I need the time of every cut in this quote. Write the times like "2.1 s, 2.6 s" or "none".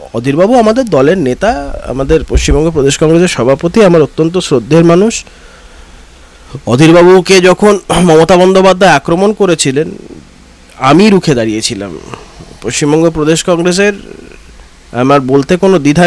none